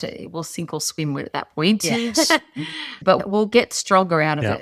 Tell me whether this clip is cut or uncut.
uncut